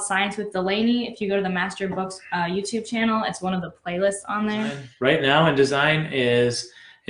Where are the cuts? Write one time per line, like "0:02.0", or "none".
0:04.8

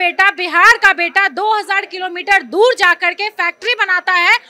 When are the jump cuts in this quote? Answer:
none

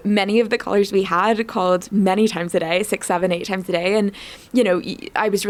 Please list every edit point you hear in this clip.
none

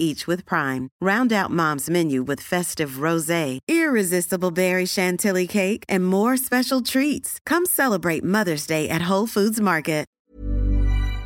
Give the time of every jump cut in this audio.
0:10.2

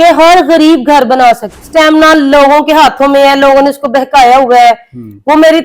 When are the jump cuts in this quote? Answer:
0:01.6

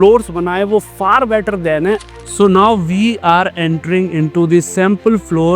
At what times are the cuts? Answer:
0:02.1

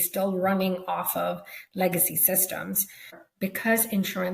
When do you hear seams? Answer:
0:03.3

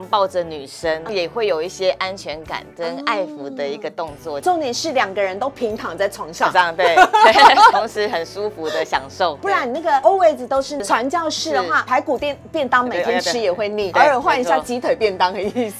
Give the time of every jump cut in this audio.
0:01.1
0:04.4
0:07.7
0:09.5
0:10.8
0:11.9
0:13.9

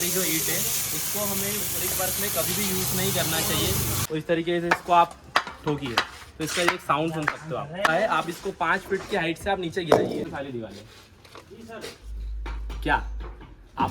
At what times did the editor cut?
0:04.0
0:07.9
0:10.3

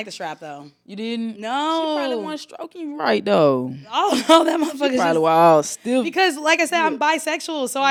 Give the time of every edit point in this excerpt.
none

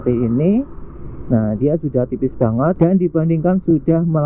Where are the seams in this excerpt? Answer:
0:02.8

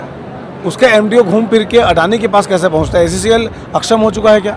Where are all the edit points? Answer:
none

